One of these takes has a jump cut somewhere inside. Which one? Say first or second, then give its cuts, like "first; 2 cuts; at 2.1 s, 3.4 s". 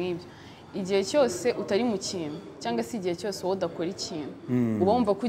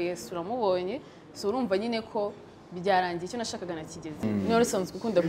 second; 1 cut; at 4.2 s